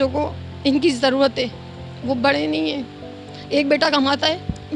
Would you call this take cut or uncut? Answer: uncut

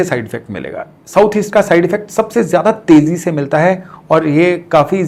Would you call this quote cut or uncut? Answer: uncut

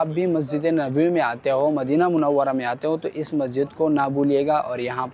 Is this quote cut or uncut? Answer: uncut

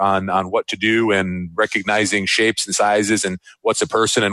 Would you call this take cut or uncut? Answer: uncut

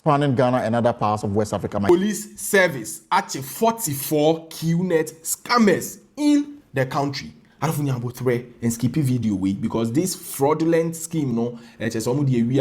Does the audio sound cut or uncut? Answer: cut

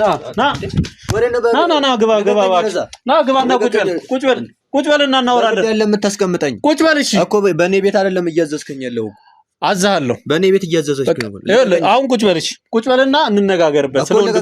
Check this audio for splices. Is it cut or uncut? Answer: uncut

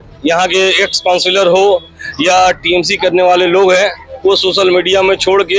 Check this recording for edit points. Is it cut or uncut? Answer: uncut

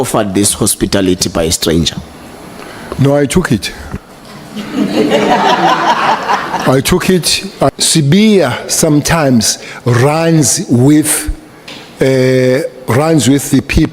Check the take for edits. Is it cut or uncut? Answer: cut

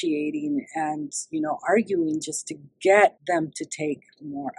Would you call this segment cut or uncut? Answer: cut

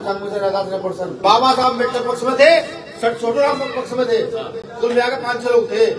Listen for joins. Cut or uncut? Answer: cut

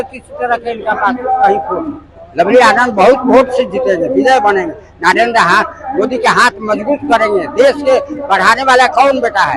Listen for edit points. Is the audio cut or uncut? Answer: uncut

